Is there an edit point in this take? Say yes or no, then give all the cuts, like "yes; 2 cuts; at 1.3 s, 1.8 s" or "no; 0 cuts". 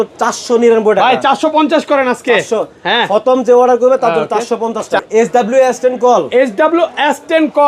yes; 1 cut; at 5.1 s